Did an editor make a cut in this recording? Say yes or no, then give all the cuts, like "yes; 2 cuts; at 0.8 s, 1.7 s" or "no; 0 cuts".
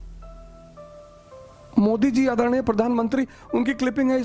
yes; 1 cut; at 1.7 s